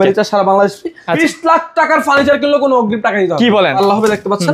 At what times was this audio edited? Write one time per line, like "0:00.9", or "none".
0:01.2
0:03.7